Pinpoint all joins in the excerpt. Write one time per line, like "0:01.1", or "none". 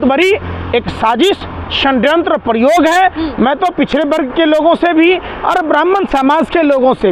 none